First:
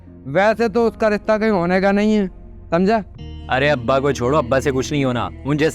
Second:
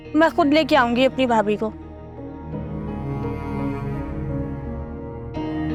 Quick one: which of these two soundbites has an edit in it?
first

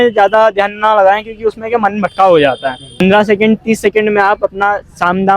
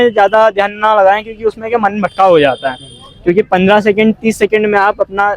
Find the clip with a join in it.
first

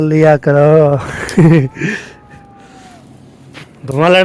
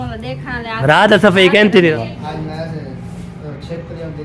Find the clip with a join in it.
second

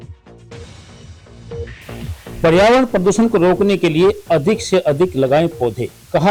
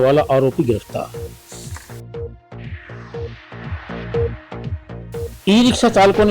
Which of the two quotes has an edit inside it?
second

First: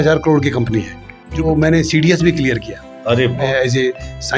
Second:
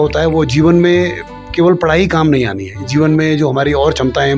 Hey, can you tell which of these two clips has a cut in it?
first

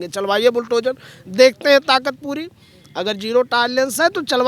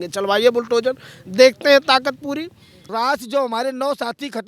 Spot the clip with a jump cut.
second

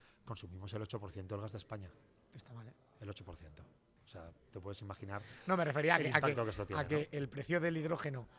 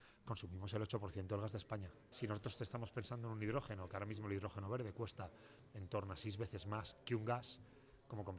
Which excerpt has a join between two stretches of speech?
second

